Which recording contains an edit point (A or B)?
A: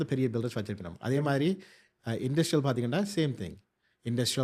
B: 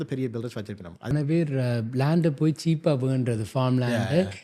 B